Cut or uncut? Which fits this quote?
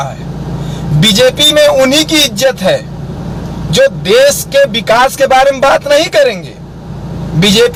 uncut